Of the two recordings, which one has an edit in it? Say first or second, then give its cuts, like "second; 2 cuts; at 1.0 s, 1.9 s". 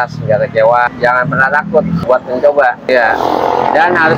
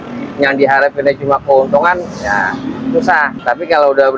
first; 2 cuts; at 0.9 s, 2.0 s